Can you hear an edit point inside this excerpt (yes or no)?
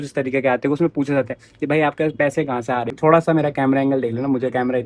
yes